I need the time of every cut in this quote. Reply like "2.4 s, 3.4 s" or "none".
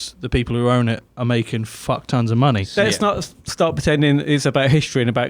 2.7 s